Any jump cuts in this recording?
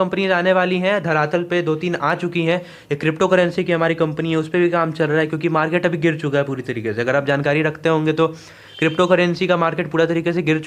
no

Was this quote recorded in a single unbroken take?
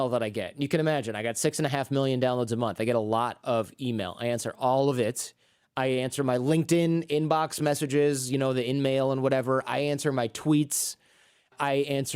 yes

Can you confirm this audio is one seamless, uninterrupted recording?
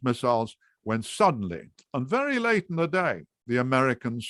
yes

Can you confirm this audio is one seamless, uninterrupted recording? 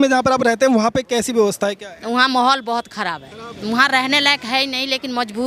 yes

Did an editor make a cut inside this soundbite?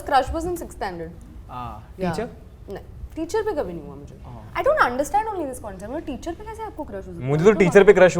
no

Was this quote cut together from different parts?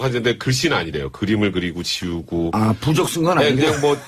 no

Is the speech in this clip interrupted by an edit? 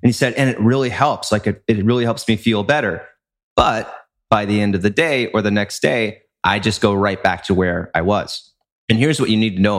no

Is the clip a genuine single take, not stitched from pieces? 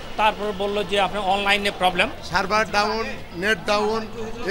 no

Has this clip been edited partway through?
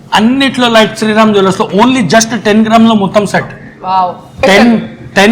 yes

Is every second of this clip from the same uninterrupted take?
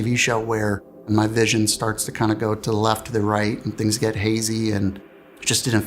no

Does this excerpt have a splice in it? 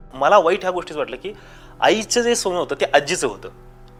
no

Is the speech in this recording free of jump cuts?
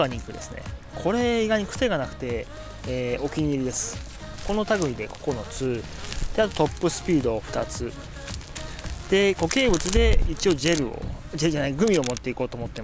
yes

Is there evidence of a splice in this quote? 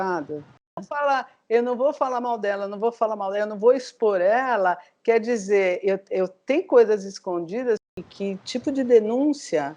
yes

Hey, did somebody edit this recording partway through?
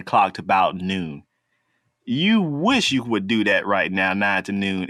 no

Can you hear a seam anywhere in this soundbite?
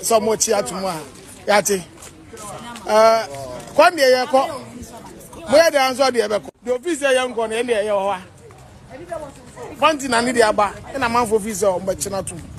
no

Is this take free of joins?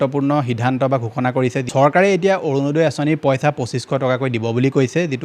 no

